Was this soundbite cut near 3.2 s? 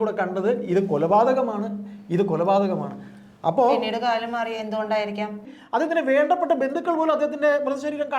no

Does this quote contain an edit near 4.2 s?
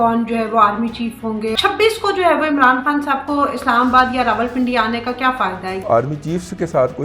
no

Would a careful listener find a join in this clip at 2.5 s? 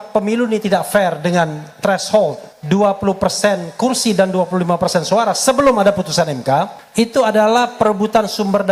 yes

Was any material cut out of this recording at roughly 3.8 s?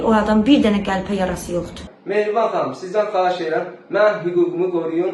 no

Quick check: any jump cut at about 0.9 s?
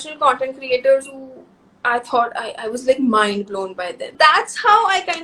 no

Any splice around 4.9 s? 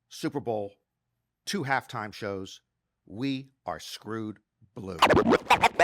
yes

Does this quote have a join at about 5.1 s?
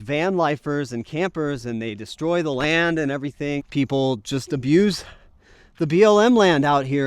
no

